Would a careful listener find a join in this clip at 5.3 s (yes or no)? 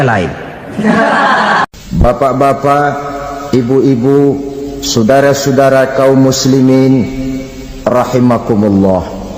no